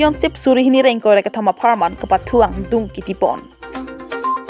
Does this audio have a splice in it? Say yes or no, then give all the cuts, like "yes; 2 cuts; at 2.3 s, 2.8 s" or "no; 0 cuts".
no; 0 cuts